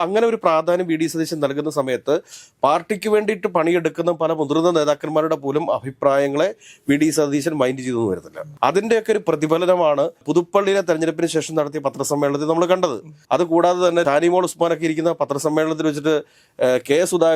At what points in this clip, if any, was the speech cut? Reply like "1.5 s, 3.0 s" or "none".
none